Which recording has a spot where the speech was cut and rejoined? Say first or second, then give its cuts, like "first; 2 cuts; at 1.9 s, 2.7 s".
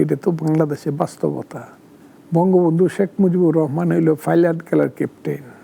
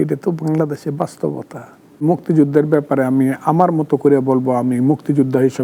second; 1 cut; at 2.0 s